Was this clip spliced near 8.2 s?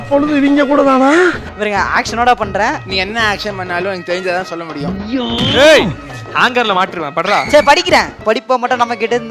yes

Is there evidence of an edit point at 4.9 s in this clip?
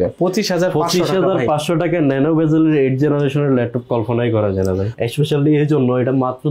yes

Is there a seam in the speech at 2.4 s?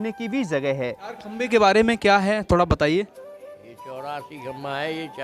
no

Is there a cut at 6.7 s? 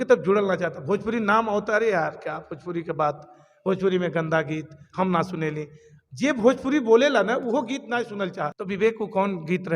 no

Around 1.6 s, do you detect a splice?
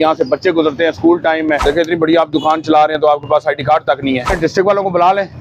yes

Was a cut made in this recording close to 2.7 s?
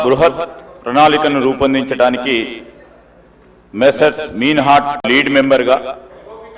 no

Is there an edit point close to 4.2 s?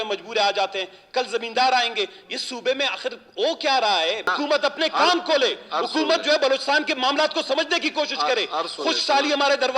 yes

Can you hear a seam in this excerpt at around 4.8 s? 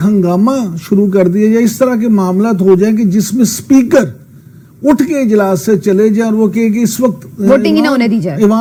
no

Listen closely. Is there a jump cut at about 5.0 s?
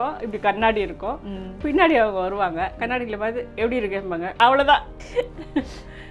yes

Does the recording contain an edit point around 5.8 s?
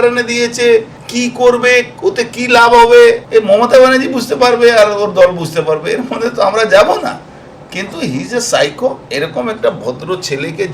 no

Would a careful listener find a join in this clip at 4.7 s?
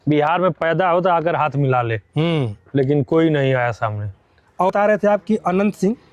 yes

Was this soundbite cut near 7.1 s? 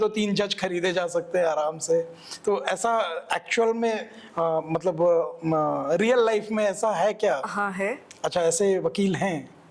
no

